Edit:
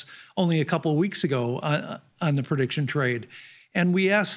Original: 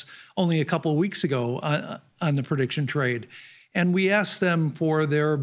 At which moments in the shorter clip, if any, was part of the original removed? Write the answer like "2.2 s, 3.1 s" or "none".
none